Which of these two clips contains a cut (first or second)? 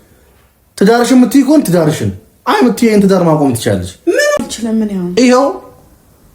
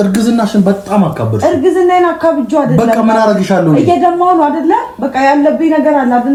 first